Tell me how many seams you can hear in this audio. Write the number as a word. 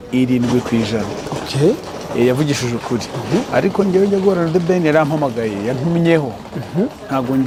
zero